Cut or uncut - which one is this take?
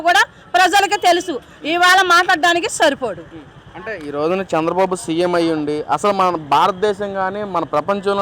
uncut